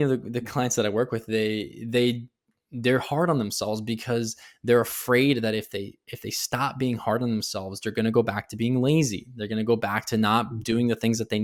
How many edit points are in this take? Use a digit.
0